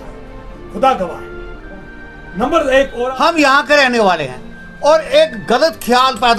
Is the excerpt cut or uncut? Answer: cut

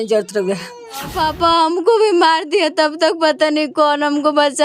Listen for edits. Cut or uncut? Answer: cut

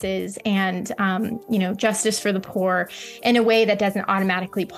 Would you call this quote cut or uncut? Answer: uncut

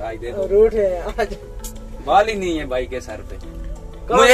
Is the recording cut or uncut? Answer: uncut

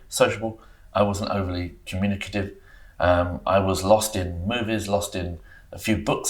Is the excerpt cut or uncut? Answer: uncut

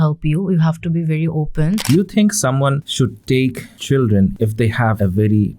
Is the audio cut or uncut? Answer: cut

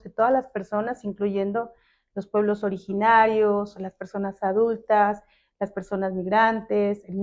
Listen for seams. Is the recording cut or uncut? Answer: uncut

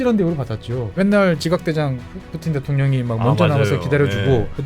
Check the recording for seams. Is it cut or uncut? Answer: cut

